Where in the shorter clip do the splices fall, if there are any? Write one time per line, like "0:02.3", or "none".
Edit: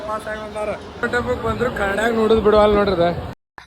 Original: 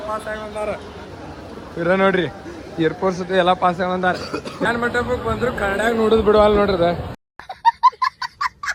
0:01.0